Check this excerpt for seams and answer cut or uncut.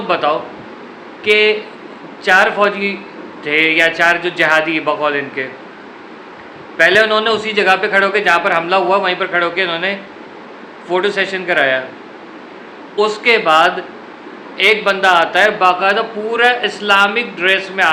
uncut